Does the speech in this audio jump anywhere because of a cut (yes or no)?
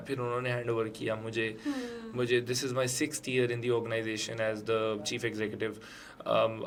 no